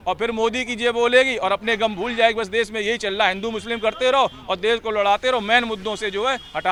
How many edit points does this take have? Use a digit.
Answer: 0